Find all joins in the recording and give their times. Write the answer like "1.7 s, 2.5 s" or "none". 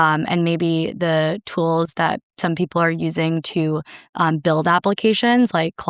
none